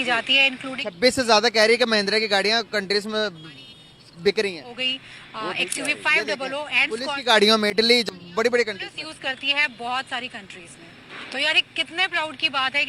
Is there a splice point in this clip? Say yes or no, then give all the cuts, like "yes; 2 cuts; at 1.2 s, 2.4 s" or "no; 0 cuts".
yes; 1 cut; at 8.1 s